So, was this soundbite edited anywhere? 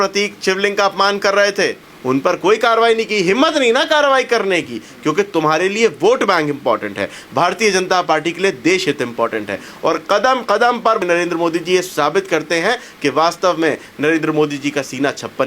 yes; 2 cuts; at 1.9 s, 11.0 s

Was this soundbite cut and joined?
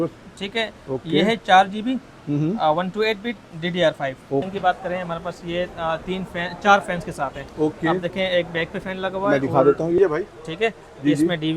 yes; 2 cuts; at 4.5 s, 10.0 s

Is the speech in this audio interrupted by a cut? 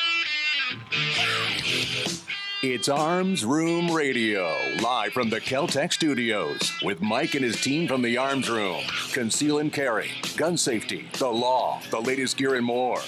yes; 1 cut; at 2.3 s

